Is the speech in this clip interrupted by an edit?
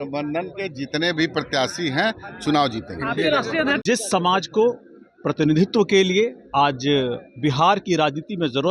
yes; 1 cut; at 3.8 s

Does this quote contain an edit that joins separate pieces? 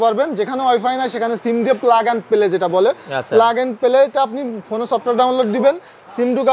no; 0 cuts

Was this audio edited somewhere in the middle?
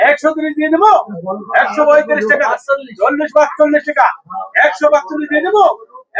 no; 0 cuts

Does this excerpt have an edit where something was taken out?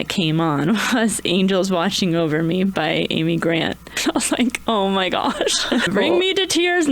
yes; 2 cuts; at 4.0 s, 5.9 s

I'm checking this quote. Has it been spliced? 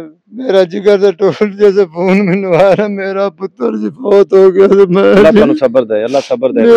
no; 0 cuts

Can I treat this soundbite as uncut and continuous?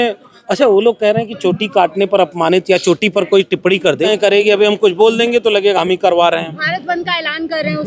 no; 1 cut; at 4.1 s

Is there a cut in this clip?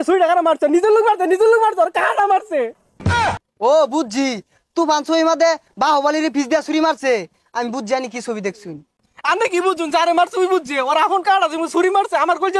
no; 0 cuts

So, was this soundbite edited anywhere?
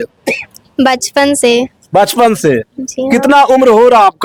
no; 0 cuts

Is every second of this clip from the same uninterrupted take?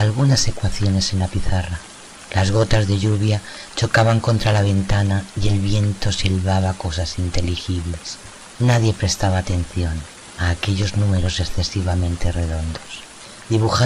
no; 1 cut; at 6.2 s

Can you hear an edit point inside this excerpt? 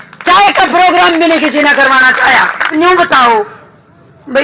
yes; 1 cut; at 2.7 s

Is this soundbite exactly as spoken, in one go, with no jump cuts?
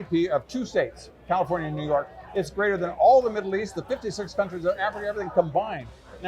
yes; 0 cuts

